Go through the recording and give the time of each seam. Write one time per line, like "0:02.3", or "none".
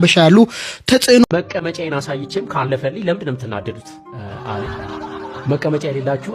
0:01.2

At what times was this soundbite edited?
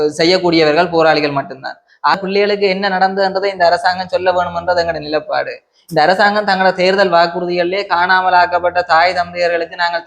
0:02.1

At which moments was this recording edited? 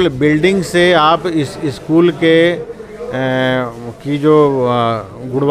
none

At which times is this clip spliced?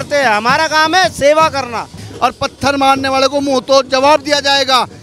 0:02.0

